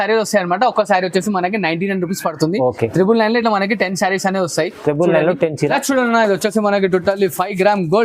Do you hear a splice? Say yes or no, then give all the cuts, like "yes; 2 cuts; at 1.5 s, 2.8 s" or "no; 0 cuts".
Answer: yes; 1 cut; at 5.7 s